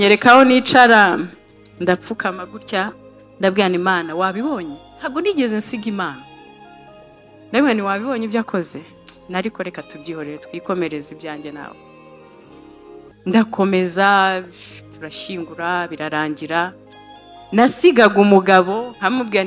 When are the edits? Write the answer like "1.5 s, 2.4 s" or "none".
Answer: 11.7 s, 13.2 s